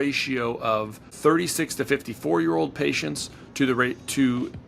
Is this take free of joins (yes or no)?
no